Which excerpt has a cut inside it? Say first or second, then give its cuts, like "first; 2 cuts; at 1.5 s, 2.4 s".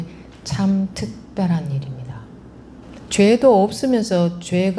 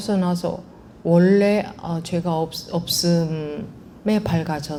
first; 1 cut; at 2.8 s